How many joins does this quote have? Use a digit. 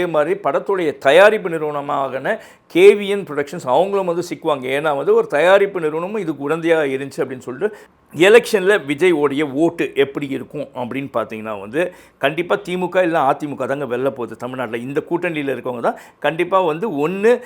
1